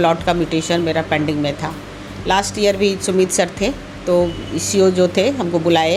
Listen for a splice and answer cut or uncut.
uncut